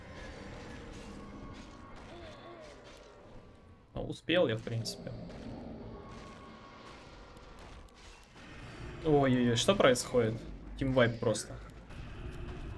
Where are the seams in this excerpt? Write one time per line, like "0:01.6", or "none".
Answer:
0:11.9